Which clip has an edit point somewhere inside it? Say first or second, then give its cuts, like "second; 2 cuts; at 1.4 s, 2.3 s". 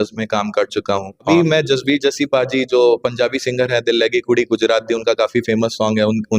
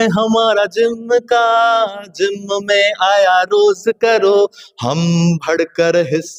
first; 1 cut; at 1.3 s